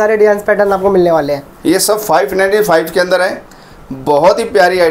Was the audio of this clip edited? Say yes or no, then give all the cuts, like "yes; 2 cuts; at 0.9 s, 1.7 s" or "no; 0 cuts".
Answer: no; 0 cuts